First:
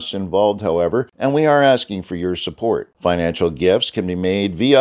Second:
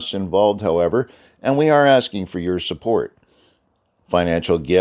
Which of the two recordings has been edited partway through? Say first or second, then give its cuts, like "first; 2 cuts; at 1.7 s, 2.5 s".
first; 2 cuts; at 1.1 s, 2.9 s